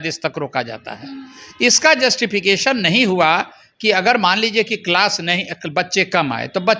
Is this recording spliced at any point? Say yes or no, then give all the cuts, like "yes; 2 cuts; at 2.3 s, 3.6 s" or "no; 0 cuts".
no; 0 cuts